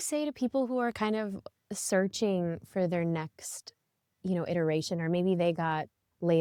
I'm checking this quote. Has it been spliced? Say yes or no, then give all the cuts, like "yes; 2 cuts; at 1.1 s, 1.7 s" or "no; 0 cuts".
no; 0 cuts